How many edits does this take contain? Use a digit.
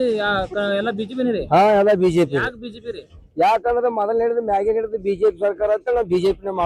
0